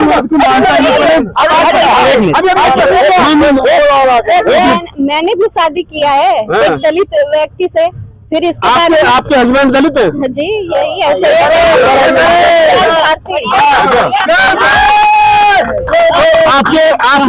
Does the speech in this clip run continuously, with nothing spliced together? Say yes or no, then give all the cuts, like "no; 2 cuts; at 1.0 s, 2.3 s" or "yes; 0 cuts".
no; 1 cut; at 4.7 s